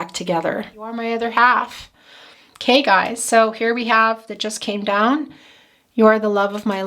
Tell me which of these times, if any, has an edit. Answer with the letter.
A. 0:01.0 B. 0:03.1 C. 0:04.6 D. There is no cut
A